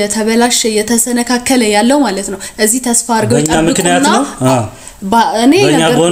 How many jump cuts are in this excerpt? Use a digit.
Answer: 0